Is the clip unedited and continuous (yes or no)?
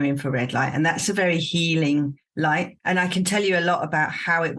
no